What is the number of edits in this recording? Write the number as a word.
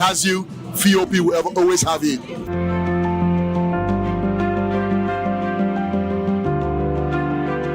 one